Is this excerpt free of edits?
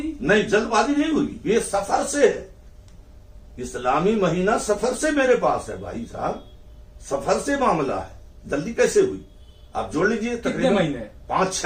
yes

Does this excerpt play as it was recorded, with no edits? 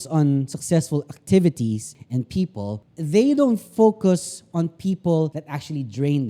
no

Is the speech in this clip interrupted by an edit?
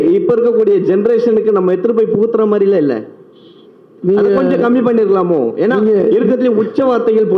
no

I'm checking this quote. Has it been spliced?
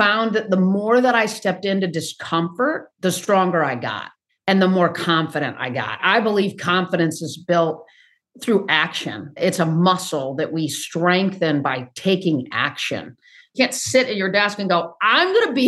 yes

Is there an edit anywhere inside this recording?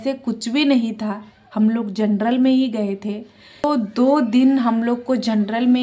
yes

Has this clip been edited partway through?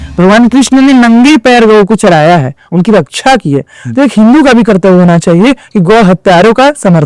no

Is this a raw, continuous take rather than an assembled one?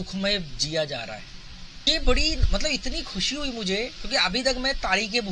no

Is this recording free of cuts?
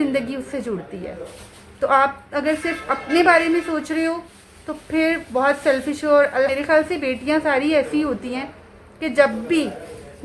no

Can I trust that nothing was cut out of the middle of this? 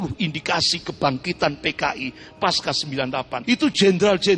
no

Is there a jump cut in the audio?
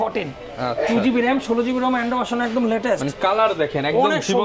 no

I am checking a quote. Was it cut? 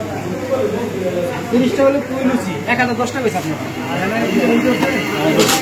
no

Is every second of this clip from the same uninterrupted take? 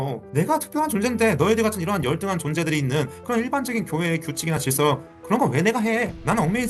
yes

